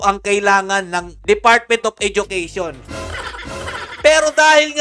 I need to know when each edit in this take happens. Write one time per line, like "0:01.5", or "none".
none